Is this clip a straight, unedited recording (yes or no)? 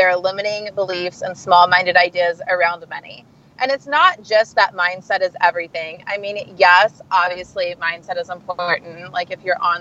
yes